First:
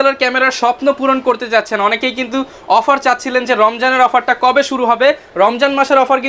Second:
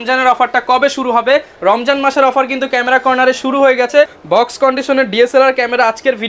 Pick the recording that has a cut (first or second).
second